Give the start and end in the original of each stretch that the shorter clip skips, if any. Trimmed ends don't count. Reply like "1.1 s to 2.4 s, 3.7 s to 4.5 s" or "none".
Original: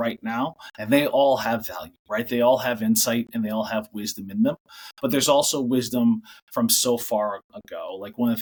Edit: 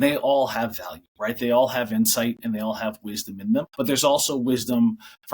4.6 s to 4.9 s